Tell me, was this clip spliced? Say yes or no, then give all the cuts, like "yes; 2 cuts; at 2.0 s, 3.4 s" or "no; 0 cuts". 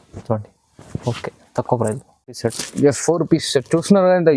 yes; 1 cut; at 2.4 s